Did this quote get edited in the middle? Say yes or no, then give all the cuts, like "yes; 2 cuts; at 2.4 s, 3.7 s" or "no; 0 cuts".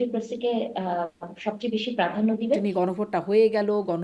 yes; 1 cut; at 2.6 s